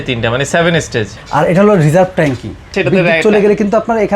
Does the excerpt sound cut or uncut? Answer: cut